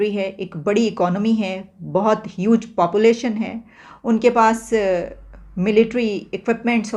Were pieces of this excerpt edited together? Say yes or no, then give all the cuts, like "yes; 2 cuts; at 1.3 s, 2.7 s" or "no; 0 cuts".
no; 0 cuts